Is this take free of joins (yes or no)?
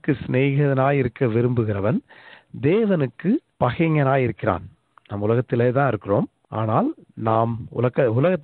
no